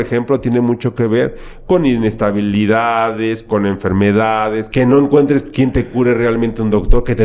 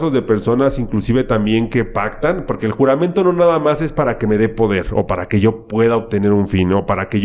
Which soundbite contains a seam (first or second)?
first